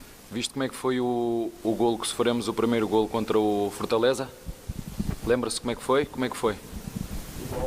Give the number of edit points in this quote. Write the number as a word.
one